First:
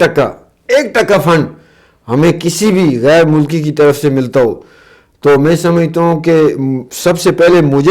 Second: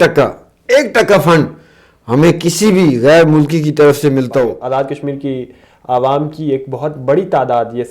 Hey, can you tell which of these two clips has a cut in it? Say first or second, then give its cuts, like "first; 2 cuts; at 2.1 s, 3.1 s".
second; 1 cut; at 4.6 s